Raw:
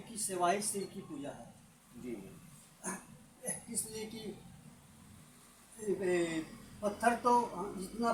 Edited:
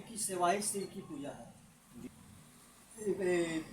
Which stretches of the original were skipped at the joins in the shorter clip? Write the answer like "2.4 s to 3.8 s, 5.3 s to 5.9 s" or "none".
2.1 s to 4.9 s